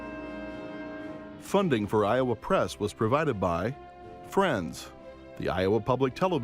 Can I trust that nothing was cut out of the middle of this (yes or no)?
no